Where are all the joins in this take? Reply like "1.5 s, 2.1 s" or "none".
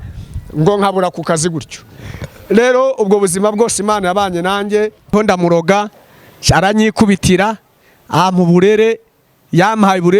5.1 s